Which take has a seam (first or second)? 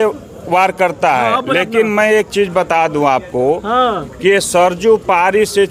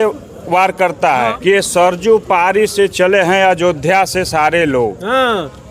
second